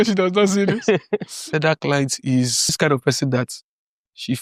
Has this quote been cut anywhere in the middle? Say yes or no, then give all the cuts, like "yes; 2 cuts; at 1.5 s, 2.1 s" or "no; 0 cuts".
yes; 2 cuts; at 1.4 s, 2.8 s